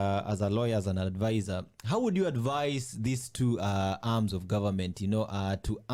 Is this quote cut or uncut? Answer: uncut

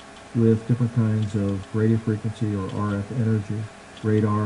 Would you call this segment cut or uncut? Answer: uncut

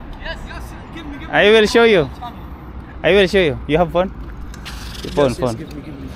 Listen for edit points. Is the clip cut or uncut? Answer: uncut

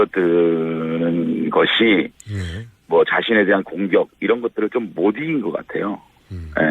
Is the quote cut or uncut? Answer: cut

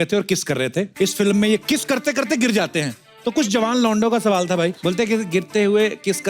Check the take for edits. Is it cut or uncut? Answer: cut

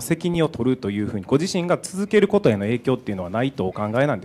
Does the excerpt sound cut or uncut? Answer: uncut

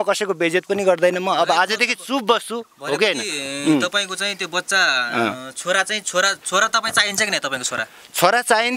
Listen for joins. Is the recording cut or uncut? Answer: uncut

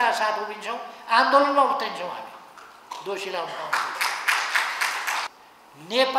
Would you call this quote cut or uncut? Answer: cut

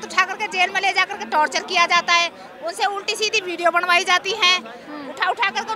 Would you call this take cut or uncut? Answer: uncut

